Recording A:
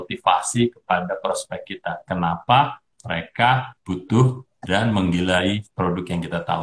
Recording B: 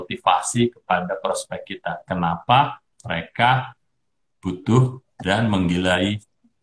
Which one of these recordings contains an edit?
A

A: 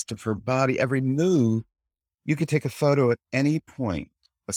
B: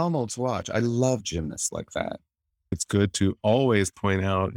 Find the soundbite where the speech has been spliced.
B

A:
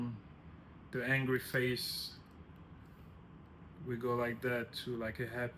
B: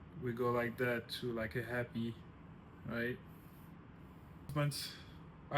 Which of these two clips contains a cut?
B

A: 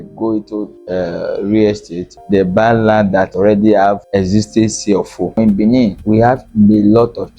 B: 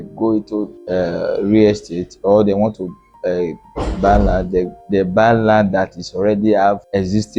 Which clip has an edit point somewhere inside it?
A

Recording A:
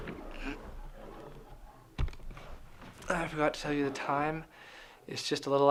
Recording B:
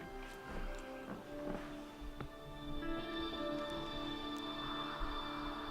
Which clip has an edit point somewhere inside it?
B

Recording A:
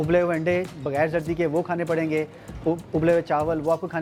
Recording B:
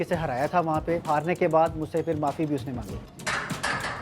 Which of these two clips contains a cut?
B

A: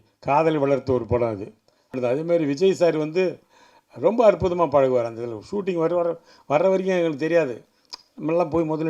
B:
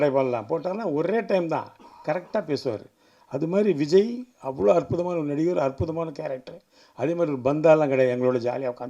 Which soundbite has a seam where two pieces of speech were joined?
A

